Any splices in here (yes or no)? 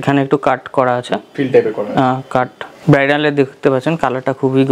yes